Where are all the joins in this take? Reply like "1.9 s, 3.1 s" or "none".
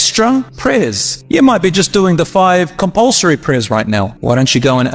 0.9 s